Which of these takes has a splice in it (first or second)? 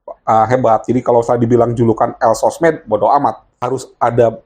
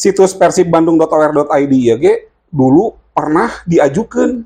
first